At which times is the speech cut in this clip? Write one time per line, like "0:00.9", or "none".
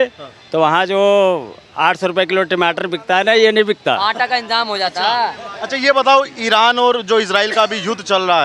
none